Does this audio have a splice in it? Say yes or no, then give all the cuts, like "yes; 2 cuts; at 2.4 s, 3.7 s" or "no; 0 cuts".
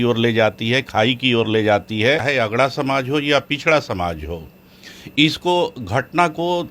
yes; 1 cut; at 2.2 s